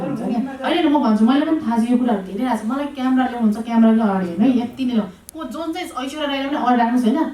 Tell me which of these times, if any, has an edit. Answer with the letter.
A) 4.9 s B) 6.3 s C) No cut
C